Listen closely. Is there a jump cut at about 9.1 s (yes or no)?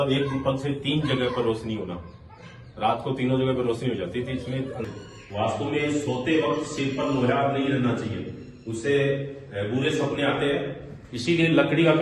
no